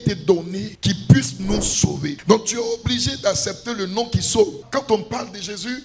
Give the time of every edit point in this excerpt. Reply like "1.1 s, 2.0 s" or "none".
2.2 s